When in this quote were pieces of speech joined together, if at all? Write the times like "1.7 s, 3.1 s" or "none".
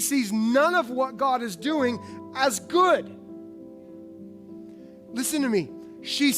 3.7 s, 5.0 s